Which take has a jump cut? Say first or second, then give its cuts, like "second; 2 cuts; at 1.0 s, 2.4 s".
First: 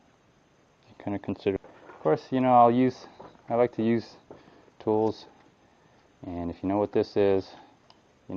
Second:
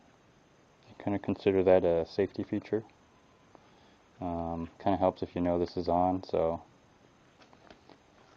second; 1 cut; at 1.6 s